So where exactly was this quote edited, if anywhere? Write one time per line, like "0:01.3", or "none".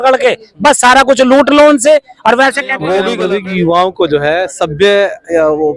0:03.1